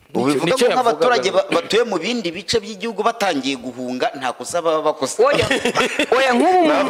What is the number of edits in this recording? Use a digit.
0